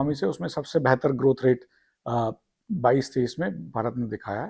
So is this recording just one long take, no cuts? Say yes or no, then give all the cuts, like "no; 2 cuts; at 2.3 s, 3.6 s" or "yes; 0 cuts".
yes; 0 cuts